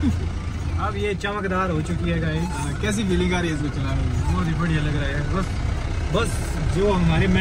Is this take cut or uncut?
uncut